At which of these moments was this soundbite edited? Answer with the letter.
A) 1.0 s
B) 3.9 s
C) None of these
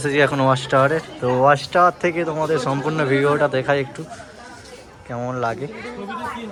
C